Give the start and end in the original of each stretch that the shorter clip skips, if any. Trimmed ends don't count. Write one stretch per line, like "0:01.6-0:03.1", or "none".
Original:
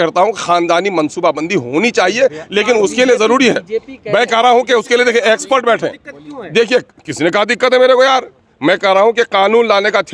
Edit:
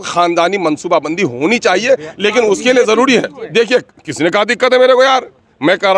0:03.7-0:06.4